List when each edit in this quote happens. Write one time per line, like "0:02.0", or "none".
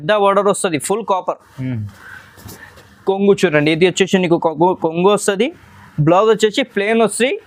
none